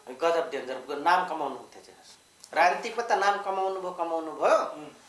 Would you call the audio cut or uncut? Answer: uncut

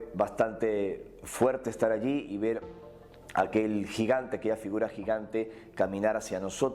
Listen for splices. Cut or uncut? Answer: cut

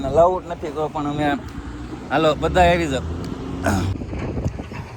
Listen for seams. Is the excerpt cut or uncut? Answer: cut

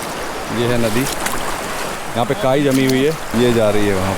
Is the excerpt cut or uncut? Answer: cut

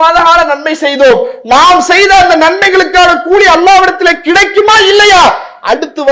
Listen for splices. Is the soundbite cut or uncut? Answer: uncut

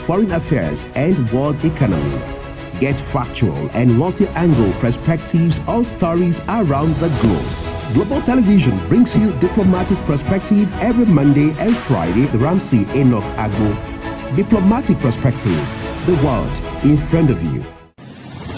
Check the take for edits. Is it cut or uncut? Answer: cut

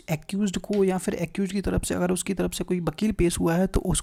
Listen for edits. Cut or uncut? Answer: uncut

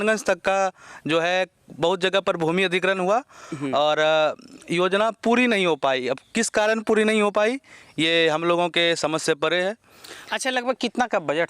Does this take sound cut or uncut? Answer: uncut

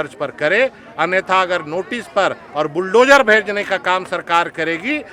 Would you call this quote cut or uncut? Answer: uncut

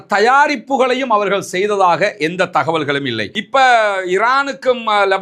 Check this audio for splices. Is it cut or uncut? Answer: cut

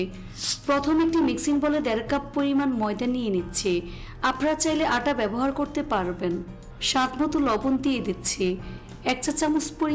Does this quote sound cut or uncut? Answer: cut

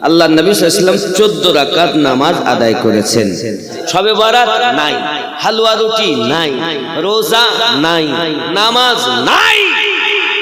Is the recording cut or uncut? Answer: cut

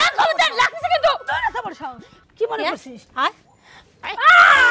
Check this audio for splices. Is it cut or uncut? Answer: cut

